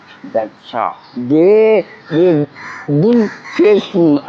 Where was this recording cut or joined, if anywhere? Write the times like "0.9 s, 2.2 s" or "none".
1.1 s, 2.0 s, 3.4 s